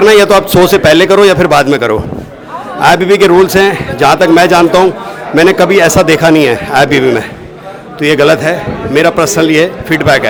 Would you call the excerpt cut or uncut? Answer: uncut